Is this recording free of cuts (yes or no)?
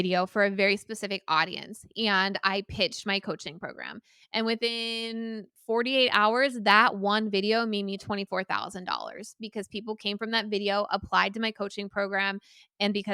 yes